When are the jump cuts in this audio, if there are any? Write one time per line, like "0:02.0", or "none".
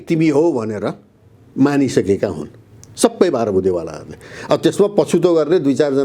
none